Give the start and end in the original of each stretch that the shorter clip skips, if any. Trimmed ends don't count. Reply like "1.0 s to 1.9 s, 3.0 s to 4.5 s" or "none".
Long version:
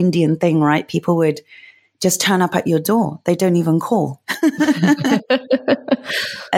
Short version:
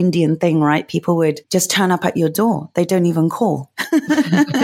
1.4 s to 1.9 s

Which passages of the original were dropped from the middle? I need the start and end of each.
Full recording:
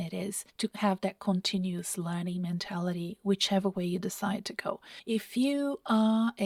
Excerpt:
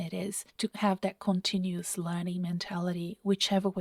none

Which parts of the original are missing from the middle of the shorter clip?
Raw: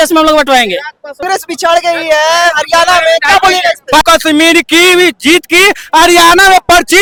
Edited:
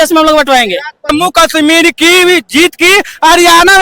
1.3 s to 4.0 s

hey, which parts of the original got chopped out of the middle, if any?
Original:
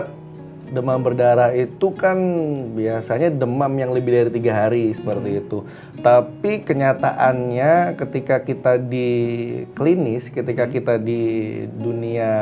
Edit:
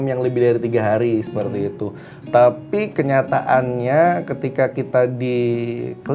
none

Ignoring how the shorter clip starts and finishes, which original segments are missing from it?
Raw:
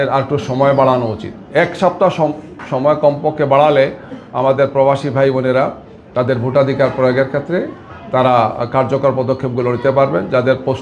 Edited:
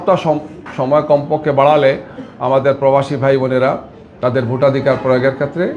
none

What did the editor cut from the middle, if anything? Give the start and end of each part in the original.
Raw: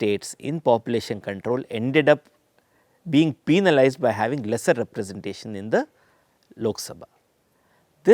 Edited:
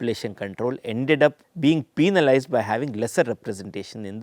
2.3 s to 3.0 s

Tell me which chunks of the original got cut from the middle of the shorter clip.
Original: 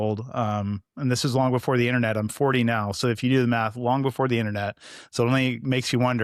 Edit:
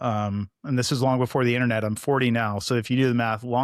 none

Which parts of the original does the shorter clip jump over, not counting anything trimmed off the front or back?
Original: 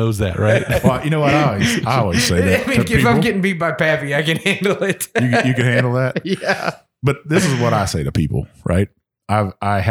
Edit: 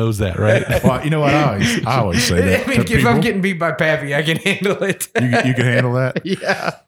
none

